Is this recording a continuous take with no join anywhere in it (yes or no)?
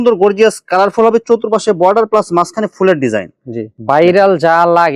no